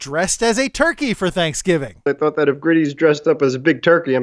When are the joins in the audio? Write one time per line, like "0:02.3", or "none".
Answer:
0:02.0